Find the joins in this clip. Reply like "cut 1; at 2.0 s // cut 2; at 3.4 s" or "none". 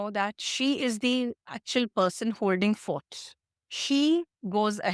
cut 1; at 3.5 s